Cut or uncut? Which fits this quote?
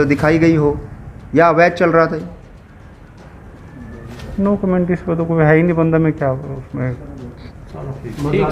uncut